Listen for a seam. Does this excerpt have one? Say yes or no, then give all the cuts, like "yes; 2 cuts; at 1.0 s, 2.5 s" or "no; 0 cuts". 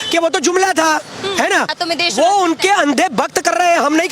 yes; 1 cut; at 1.7 s